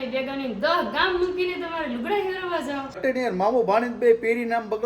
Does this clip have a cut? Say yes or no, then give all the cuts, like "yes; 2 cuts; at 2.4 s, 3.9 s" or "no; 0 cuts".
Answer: yes; 1 cut; at 2.9 s